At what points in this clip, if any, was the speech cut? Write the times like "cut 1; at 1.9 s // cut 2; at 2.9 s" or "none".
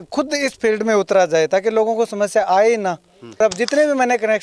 cut 1; at 3.4 s